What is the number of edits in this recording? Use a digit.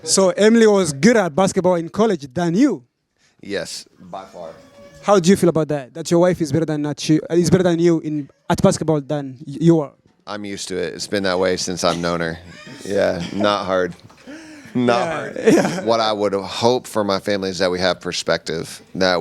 1